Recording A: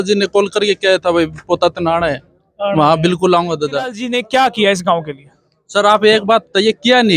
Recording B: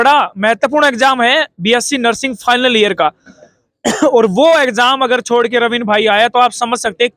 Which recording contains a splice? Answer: A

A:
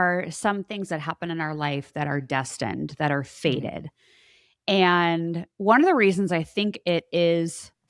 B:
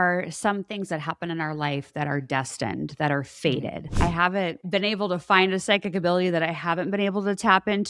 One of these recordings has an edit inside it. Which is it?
B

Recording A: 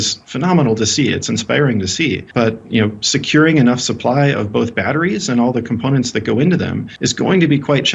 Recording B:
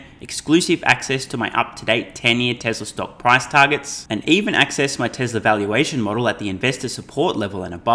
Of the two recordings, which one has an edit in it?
A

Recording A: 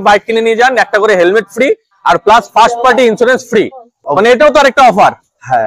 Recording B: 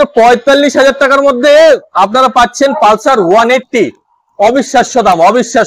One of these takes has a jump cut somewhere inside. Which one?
A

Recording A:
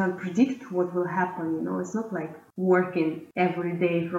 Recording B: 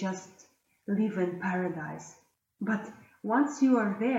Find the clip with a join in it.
A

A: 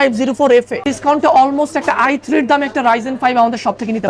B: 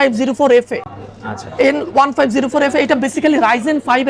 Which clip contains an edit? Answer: A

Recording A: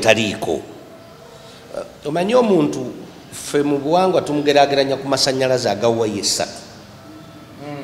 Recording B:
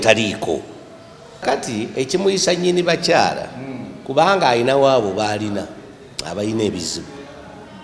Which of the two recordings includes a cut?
B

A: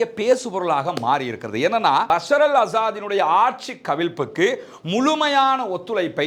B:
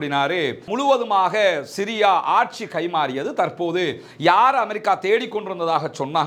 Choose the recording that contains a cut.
A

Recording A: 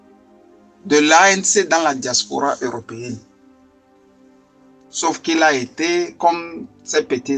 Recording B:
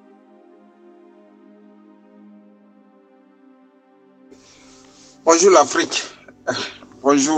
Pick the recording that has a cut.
A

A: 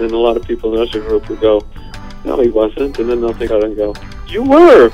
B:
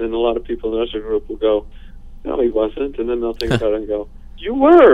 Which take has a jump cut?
A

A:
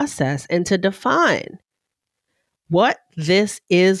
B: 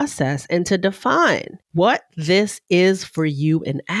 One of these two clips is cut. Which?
B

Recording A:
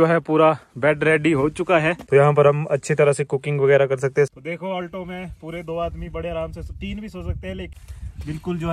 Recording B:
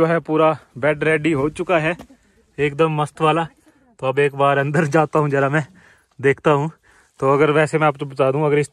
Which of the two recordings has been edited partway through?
A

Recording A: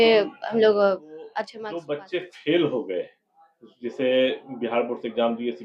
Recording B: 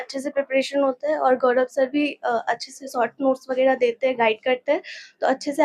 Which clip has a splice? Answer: A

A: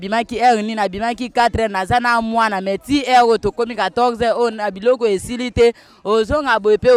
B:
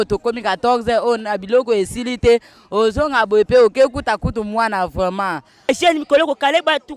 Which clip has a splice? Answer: B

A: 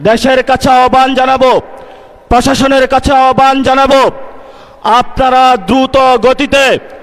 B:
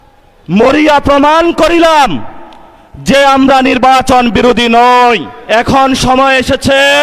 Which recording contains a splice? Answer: B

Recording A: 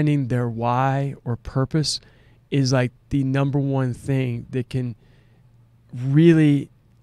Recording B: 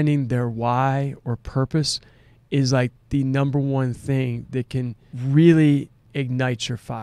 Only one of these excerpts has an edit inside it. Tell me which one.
B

